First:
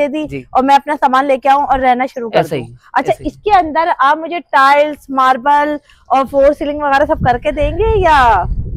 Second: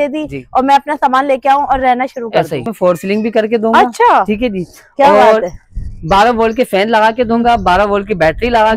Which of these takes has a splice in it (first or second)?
second